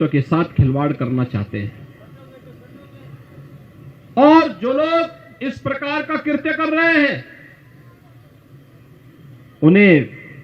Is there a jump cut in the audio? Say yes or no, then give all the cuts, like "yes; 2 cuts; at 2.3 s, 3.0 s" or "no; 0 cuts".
no; 0 cuts